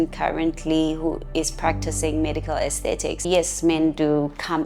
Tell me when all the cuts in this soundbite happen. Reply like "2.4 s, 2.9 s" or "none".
3.3 s